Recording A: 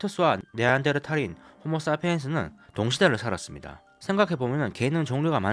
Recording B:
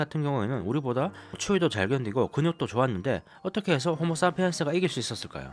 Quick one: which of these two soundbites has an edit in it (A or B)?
A